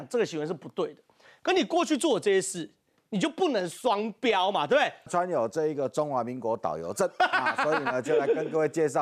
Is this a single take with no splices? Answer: no; 1 cut; at 5.1 s

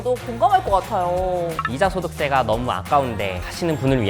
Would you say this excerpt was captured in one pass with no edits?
no; 1 cut; at 1.6 s

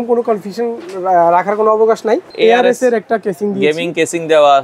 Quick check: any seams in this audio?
yes; 1 cut; at 2.3 s

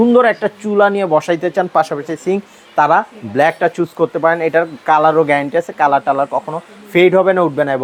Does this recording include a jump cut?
no; 0 cuts

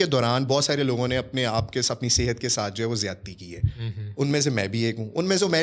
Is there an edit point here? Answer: no; 0 cuts

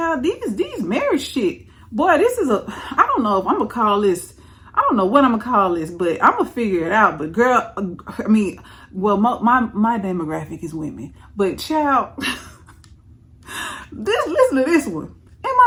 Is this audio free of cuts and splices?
yes; 0 cuts

